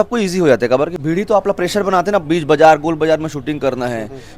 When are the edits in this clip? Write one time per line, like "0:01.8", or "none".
none